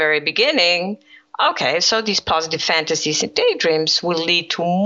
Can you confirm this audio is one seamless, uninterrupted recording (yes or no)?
yes